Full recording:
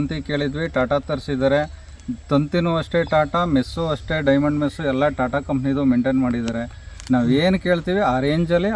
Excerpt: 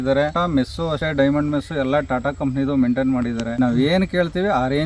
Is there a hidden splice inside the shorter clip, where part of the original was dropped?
yes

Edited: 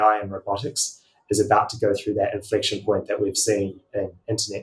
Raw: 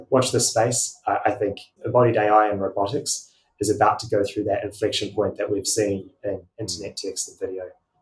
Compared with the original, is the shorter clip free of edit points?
yes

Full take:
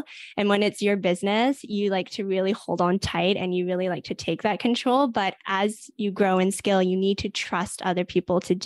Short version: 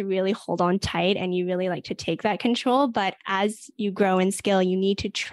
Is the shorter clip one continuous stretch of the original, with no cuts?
yes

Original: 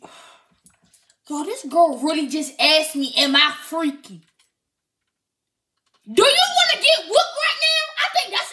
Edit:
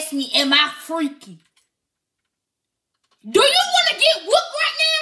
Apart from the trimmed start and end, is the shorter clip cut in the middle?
no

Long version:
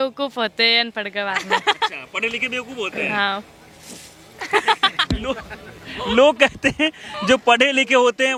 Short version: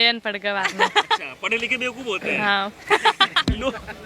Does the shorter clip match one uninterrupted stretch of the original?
no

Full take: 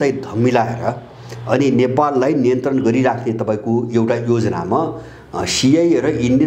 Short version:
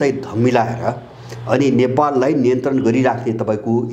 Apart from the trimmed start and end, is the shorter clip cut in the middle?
no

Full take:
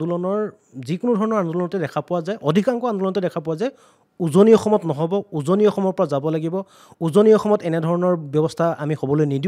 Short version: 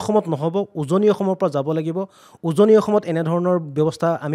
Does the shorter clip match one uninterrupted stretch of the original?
yes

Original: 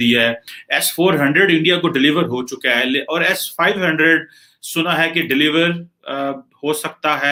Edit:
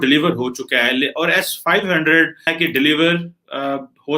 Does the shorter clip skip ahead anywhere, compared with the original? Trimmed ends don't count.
yes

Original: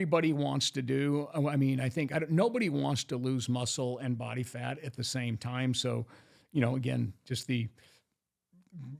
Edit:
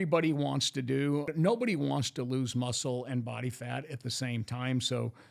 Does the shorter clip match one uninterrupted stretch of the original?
no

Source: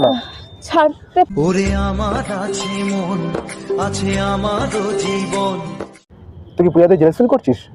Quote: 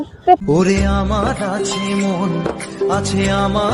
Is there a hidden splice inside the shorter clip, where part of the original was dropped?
no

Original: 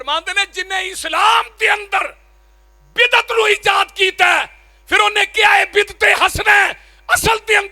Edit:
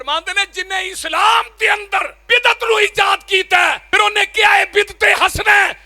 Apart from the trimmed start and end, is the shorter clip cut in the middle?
yes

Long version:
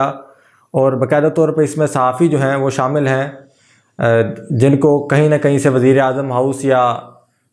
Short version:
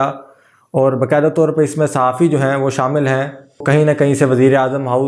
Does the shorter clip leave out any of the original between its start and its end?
yes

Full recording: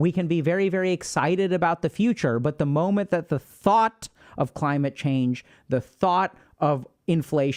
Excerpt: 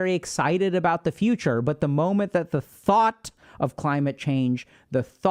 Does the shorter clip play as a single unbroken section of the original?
yes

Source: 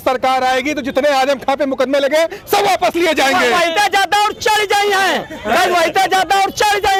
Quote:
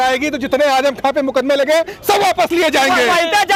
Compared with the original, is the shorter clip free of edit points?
yes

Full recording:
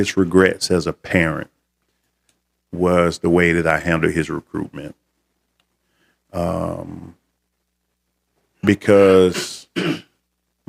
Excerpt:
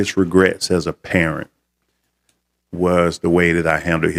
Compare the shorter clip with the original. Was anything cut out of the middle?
no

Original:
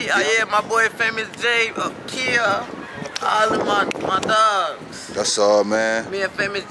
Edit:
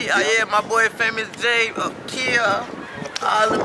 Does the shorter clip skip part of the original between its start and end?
no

